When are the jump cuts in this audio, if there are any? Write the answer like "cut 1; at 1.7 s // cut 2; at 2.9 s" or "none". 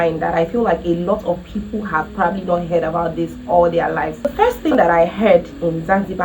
cut 1; at 4.3 s